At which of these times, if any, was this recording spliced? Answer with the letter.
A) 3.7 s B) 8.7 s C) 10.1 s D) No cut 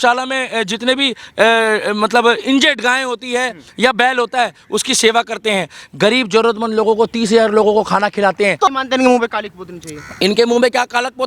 B